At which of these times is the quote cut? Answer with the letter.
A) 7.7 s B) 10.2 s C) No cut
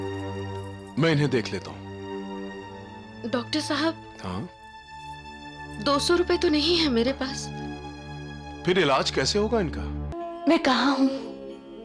B